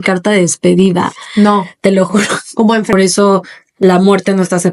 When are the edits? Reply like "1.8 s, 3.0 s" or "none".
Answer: 2.9 s